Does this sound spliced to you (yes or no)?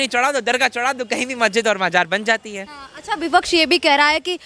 no